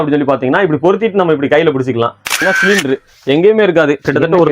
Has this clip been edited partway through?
yes; 1 cut; at 2.4 s

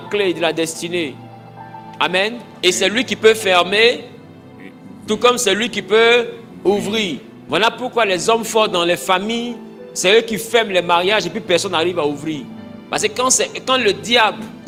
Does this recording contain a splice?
no; 0 cuts

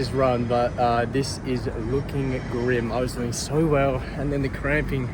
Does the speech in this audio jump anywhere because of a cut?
no; 0 cuts

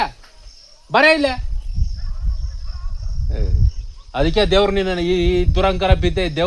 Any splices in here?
no; 0 cuts

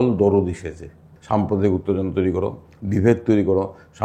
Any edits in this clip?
yes; 1 cut; at 1.1 s

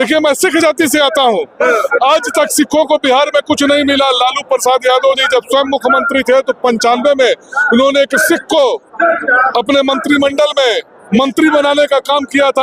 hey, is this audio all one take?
yes; 0 cuts

